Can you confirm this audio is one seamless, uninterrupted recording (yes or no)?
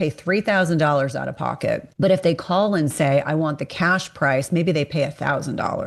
no